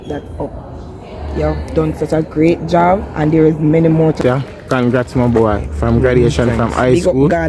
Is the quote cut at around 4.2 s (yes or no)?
yes